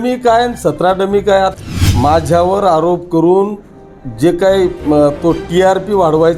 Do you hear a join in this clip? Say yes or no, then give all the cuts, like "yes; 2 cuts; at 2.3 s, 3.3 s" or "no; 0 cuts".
yes; 1 cut; at 1.6 s